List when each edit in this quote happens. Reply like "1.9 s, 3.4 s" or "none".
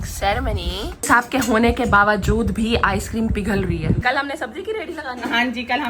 1.1 s, 4.0 s